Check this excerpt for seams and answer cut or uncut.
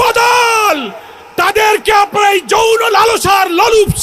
uncut